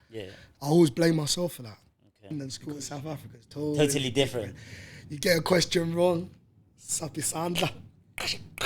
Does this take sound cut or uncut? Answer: cut